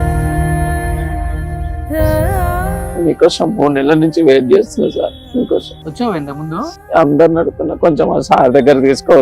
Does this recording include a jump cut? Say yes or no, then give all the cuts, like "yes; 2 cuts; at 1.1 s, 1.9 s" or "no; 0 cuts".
yes; 2 cuts; at 5.8 s, 6.7 s